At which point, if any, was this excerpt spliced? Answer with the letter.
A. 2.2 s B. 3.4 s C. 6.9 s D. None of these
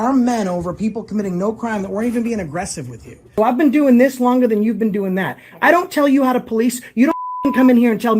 B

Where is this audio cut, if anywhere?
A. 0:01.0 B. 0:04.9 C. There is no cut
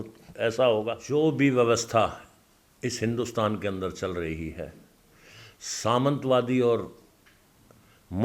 A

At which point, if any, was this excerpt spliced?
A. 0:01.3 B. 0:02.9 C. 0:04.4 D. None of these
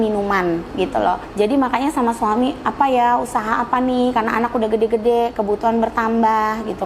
A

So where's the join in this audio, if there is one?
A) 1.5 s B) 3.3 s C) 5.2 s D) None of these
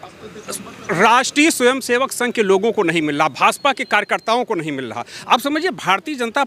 D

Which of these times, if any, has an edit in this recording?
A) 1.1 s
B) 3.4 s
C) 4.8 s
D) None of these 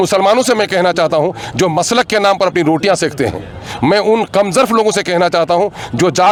D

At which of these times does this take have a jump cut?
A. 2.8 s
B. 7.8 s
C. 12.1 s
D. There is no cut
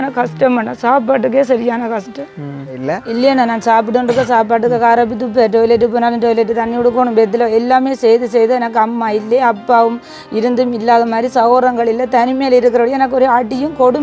A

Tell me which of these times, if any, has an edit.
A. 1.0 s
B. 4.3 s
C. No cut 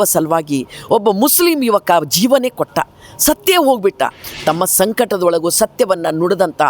B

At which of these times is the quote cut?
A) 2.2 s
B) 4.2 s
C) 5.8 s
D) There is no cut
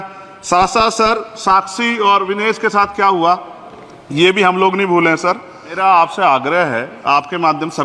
C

